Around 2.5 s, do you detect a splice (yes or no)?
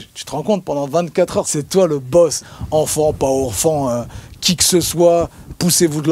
yes